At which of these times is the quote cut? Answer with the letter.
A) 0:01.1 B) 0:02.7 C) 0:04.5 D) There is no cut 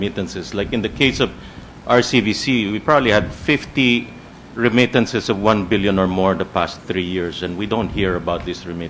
B